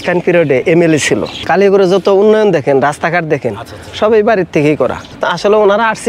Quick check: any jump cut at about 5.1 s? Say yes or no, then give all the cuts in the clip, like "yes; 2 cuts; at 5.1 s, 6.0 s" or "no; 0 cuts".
yes; 2 cuts; at 1.4 s, 5.1 s